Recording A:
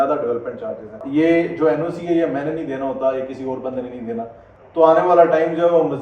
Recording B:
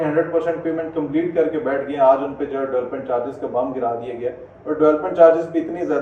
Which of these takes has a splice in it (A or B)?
A